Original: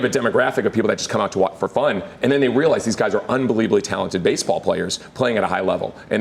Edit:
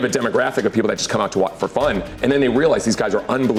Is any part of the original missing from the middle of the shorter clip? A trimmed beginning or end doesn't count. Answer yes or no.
no